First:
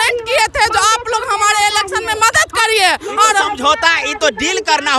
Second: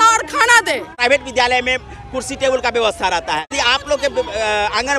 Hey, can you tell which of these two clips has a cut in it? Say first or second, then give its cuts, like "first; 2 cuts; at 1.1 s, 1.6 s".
second; 2 cuts; at 0.9 s, 3.5 s